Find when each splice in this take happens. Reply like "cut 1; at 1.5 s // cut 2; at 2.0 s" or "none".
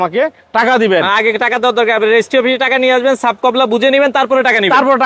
none